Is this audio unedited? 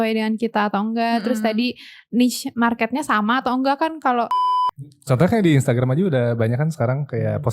no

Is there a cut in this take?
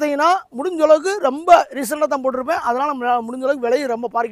no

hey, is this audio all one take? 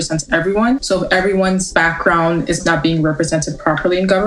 no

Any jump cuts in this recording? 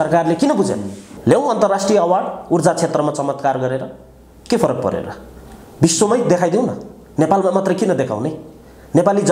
yes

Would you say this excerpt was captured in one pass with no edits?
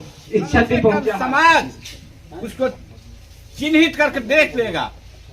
no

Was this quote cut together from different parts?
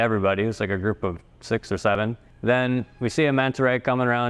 yes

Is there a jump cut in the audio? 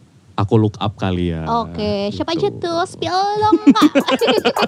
no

